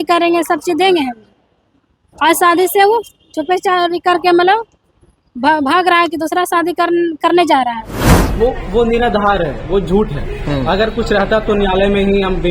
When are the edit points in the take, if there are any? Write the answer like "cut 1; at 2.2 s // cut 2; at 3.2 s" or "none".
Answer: cut 1; at 8.1 s

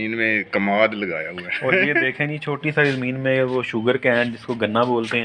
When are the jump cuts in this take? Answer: none

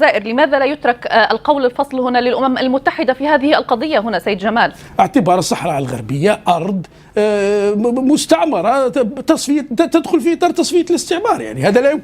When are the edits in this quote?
cut 1; at 4.8 s

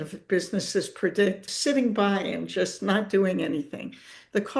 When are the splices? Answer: none

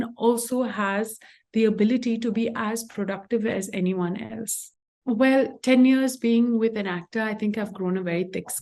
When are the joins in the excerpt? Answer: cut 1; at 5.0 s

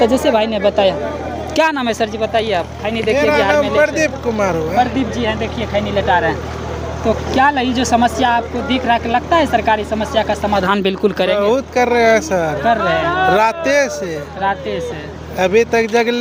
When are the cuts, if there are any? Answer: none

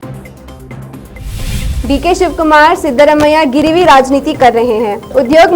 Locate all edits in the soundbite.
cut 1; at 1.0 s

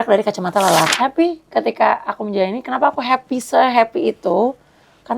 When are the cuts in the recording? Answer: cut 1; at 0.9 s

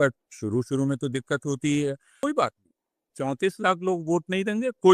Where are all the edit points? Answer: cut 1; at 2.2 s

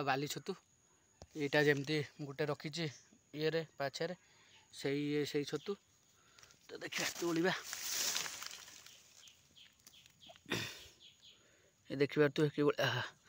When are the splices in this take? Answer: none

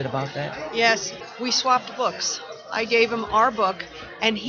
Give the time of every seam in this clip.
cut 1; at 1.1 s

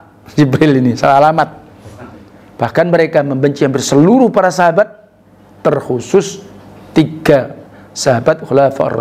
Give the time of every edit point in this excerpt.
cut 1; at 1.9 s

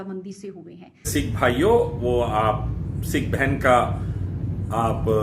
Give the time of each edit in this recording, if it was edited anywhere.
cut 1; at 1.1 s

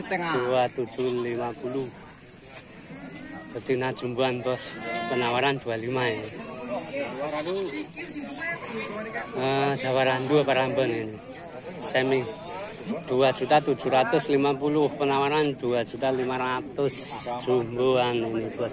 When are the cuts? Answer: none

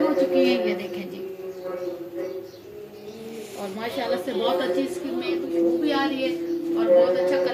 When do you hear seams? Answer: none

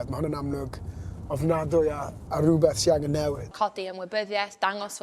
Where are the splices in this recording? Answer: cut 1; at 3.5 s

